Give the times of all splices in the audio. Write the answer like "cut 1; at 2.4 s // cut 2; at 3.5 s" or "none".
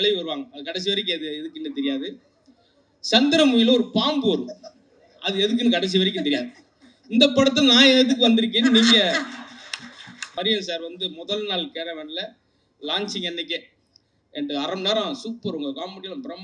cut 1; at 10.3 s